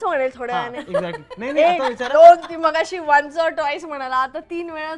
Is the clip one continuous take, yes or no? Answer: yes